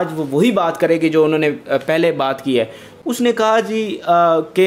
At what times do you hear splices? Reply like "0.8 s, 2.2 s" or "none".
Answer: 2.8 s

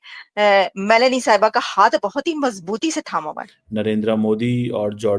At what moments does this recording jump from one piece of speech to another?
3.4 s

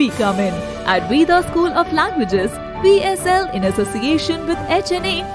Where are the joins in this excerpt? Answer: none

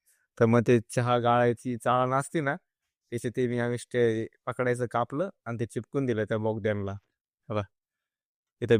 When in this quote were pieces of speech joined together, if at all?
none

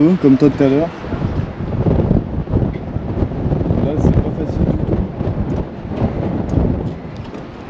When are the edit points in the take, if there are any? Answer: none

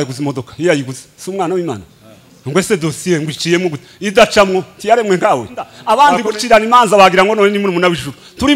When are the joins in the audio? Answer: 5.8 s

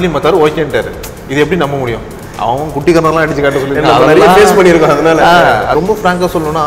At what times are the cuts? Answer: 5.7 s

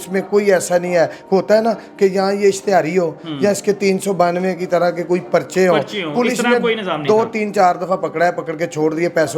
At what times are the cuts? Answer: none

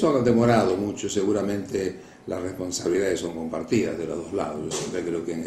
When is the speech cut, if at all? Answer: 3.9 s

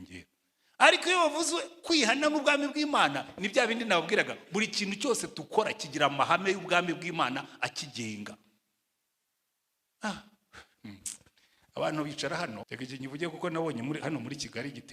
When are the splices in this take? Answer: 12.7 s

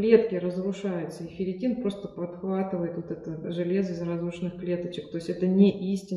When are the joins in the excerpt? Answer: none

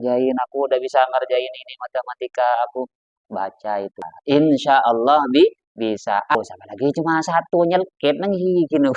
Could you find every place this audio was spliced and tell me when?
4.1 s, 6.4 s

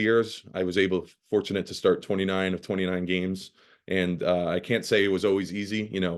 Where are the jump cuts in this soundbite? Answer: none

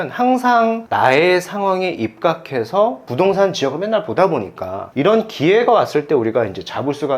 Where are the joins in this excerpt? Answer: 4.9 s

